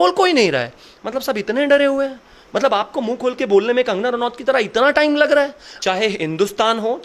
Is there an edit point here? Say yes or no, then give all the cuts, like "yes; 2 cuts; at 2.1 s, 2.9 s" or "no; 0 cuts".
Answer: yes; 1 cut; at 5.7 s